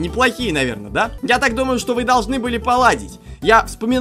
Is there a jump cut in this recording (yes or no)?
yes